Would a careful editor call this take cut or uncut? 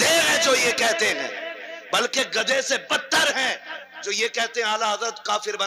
uncut